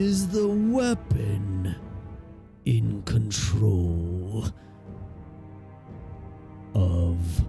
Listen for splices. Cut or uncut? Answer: uncut